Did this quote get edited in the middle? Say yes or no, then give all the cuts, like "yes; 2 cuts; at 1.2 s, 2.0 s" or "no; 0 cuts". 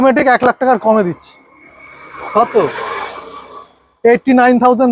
no; 0 cuts